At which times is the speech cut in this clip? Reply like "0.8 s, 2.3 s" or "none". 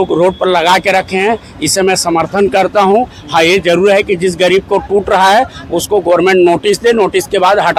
none